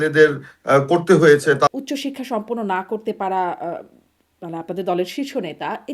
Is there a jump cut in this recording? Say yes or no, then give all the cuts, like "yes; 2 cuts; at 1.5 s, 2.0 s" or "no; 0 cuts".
yes; 1 cut; at 1.7 s